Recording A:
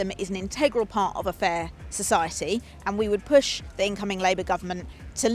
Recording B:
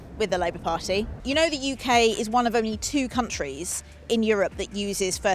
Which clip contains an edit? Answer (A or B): B